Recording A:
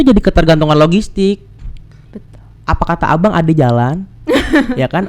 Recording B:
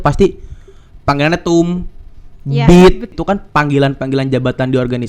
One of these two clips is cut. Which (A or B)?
B